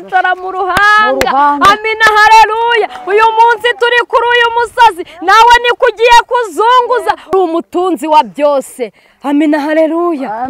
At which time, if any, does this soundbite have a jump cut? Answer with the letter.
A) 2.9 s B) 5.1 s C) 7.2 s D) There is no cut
C